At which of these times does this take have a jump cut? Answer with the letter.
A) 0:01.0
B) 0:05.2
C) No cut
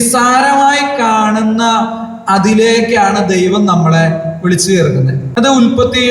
B